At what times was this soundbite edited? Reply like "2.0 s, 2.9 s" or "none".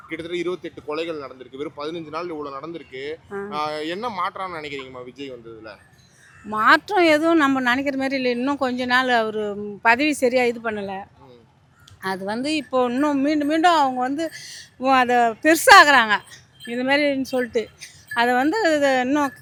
none